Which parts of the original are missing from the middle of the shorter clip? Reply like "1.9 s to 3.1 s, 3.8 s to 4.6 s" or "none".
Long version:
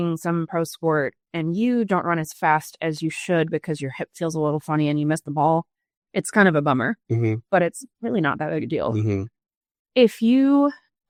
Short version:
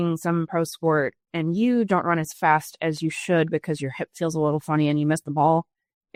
none